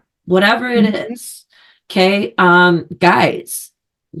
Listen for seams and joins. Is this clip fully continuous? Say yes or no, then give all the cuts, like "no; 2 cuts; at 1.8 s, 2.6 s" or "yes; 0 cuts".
yes; 0 cuts